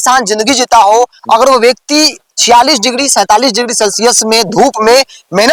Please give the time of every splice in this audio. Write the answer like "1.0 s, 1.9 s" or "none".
none